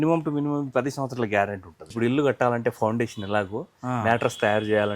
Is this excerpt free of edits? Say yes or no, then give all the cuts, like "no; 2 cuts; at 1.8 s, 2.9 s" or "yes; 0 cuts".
no; 1 cut; at 1.8 s